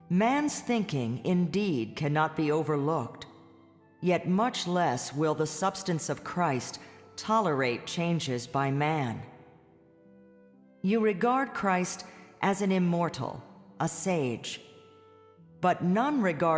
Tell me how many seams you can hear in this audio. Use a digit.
1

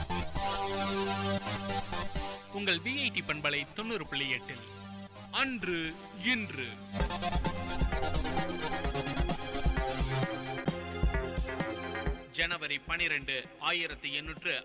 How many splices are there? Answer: 2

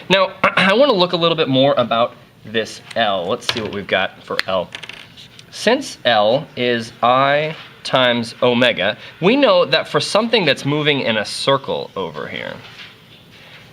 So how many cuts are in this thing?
1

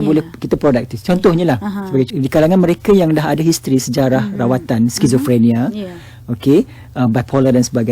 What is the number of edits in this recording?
1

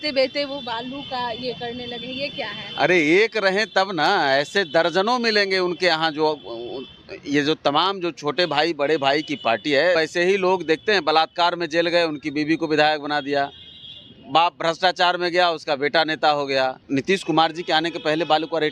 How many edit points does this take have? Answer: 2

